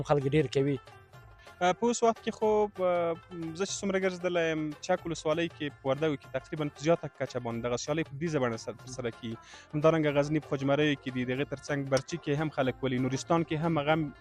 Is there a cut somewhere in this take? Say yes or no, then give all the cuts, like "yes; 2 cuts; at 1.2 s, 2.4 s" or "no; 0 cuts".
no; 0 cuts